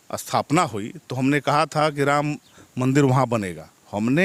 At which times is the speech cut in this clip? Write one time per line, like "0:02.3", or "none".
none